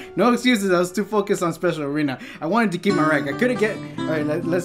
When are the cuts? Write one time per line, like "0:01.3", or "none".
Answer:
none